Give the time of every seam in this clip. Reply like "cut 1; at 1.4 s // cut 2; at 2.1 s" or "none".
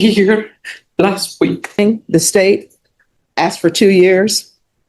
cut 1; at 1.8 s